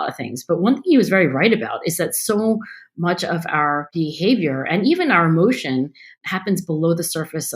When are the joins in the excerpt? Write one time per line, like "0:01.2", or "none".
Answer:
0:03.9
0:06.1